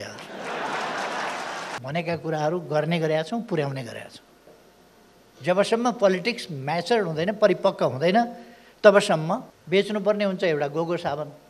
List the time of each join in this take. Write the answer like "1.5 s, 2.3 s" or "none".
1.7 s, 9.5 s

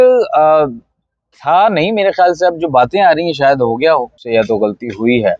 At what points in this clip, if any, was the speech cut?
4.2 s

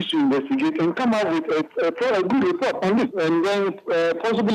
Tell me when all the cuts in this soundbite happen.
3.1 s

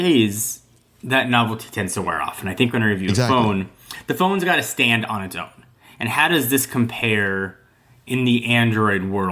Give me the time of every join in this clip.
none

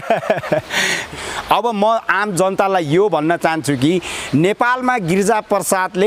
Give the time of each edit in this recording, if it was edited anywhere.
1.0 s

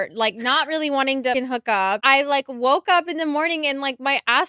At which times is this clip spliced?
none

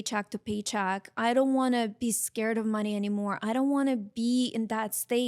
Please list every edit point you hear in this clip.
none

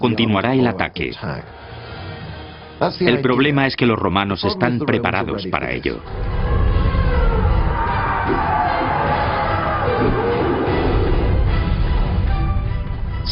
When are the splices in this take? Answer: none

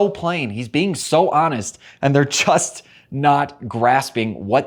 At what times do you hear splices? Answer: none

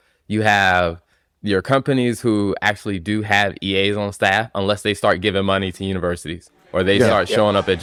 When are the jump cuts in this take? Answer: none

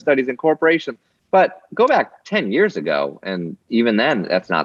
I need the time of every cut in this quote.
none

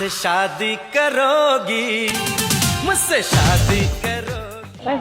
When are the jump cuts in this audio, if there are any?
none

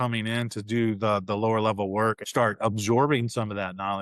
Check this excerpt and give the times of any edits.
2.2 s

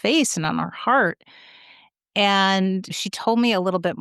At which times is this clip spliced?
3.0 s

